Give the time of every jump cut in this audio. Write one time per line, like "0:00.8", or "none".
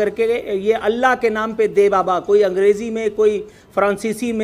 none